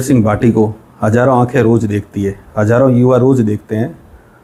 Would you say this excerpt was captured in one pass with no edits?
yes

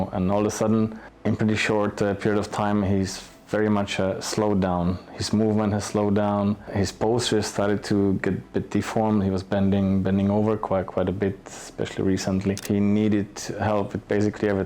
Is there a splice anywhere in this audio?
yes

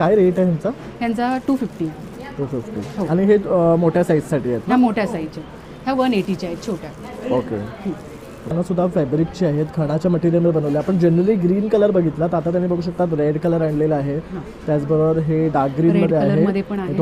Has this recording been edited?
yes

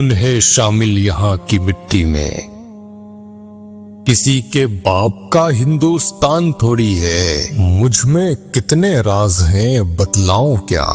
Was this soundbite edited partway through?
no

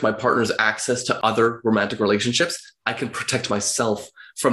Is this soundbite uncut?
no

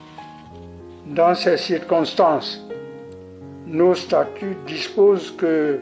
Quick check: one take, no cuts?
no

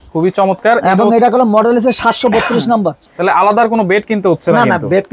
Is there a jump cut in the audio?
yes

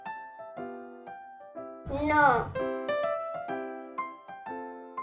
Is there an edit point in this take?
no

